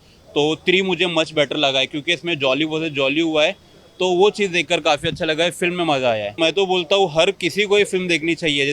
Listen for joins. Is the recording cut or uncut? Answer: uncut